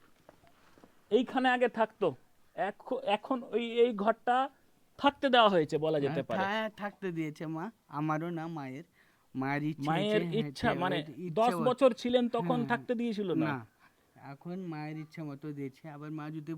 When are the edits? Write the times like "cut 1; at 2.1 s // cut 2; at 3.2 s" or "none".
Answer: none